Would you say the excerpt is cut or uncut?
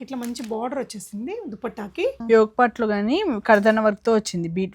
cut